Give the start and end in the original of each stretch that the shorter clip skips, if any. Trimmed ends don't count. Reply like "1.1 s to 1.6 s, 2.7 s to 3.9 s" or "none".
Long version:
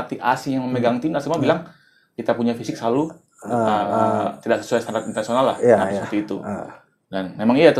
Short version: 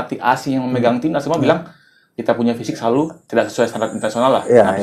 3.2 s to 4.4 s